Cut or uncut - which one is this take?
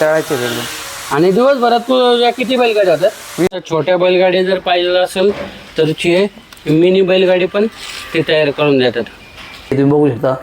cut